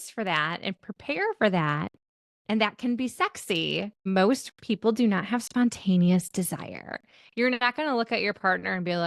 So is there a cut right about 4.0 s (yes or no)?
yes